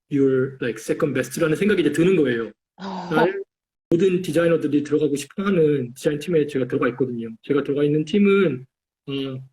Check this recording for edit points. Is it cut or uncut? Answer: cut